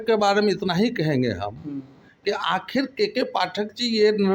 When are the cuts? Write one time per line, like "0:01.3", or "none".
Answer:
none